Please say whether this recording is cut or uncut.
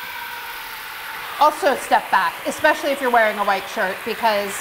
uncut